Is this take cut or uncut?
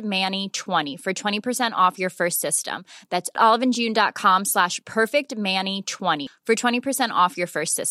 cut